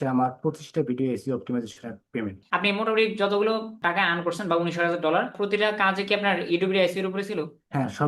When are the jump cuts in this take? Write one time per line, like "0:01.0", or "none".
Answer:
0:02.4
0:05.4